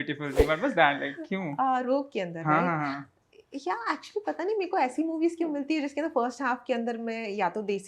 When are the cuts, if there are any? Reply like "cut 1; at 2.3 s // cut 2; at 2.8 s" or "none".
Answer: none